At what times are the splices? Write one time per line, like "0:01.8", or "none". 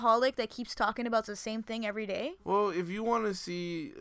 0:02.3